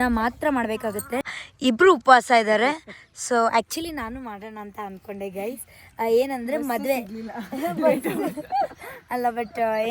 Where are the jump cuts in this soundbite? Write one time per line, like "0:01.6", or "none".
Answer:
0:01.2